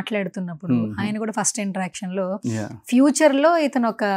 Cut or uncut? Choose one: uncut